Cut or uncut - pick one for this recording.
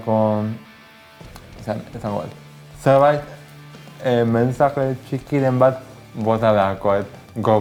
uncut